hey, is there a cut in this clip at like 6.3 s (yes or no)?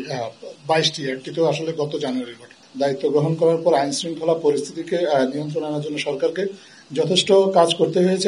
no